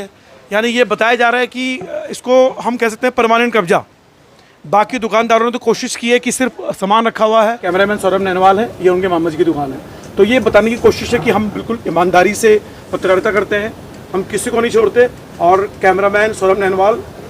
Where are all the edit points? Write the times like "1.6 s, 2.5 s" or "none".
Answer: 7.6 s